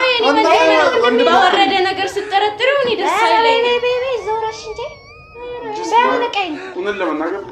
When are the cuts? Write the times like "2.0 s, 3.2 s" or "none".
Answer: none